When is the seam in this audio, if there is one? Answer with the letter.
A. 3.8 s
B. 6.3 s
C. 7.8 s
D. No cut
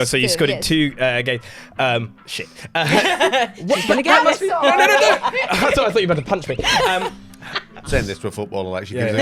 C